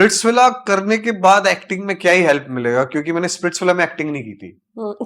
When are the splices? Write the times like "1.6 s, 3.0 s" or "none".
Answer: none